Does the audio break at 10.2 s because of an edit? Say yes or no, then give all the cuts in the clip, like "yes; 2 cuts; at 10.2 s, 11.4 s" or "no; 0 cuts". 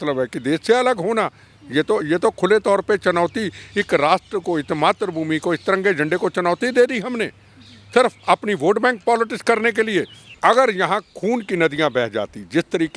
yes; 1 cut; at 10.2 s